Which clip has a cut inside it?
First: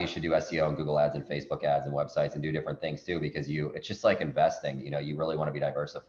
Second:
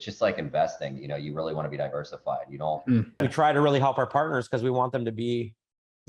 second; 1 cut; at 3.2 s

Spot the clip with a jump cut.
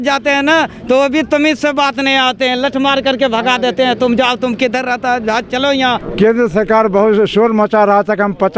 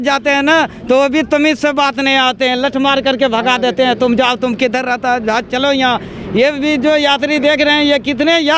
first; 1 cut; at 6.0 s

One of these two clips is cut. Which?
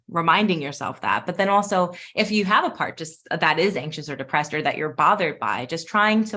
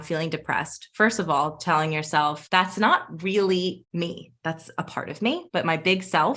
second; 3 cuts; at 2.4 s, 3.8 s, 5.5 s

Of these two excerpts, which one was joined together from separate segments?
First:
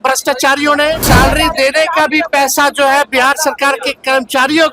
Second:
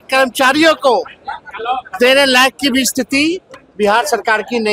first; 1 cut; at 1.0 s

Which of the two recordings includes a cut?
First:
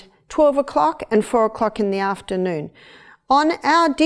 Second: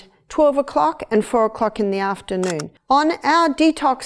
second; 1 cut; at 2.7 s

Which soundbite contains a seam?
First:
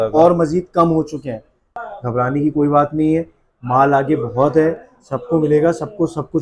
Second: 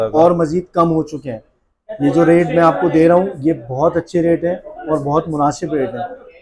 first; 1 cut; at 1.8 s

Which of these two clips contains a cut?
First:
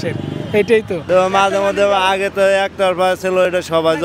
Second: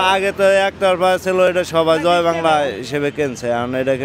first; 1 cut; at 1.0 s

